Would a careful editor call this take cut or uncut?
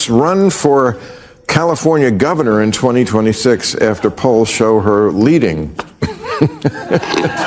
uncut